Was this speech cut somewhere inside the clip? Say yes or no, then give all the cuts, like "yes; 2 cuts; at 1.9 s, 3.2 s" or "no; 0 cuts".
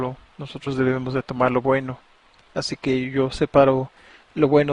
yes; 1 cut; at 1.4 s